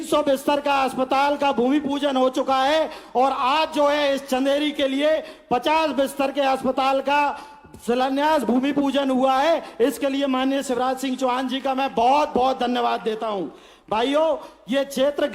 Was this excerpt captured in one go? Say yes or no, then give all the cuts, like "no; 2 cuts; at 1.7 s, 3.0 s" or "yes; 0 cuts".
yes; 0 cuts